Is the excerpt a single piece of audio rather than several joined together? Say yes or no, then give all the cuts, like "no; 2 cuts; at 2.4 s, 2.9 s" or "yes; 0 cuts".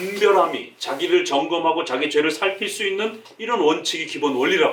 yes; 0 cuts